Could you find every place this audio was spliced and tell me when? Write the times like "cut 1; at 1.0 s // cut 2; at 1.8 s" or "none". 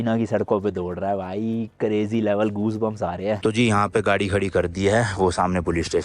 cut 1; at 3.4 s